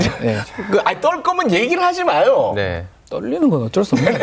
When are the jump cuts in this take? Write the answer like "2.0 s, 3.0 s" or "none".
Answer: none